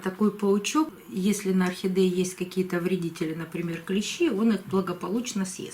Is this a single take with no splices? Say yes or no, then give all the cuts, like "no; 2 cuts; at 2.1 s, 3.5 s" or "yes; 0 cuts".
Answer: no; 1 cut; at 1.0 s